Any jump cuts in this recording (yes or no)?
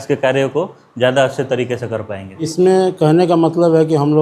yes